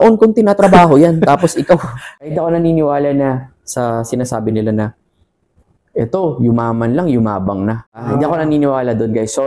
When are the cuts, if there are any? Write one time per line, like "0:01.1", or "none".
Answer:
0:02.1
0:08.0